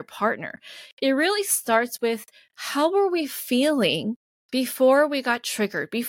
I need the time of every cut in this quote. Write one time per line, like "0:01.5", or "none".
0:04.3

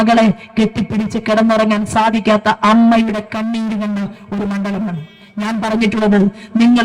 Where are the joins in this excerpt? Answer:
none

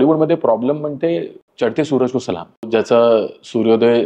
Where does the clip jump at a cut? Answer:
0:01.4
0:02.7

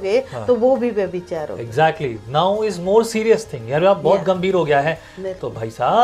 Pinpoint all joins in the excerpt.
none

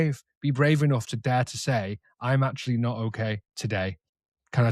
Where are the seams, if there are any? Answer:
0:03.8

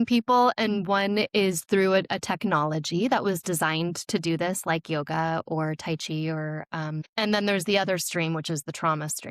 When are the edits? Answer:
0:07.1

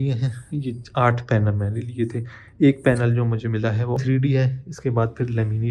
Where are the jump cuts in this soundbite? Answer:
0:04.0

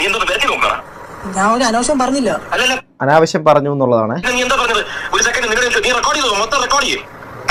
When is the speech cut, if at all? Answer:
none

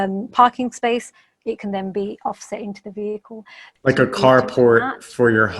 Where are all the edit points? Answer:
0:03.6

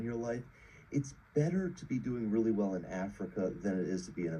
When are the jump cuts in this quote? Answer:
0:01.7

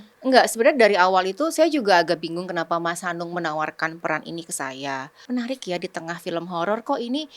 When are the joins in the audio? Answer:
0:05.1

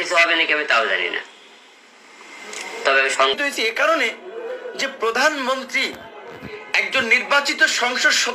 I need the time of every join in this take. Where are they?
0:03.4

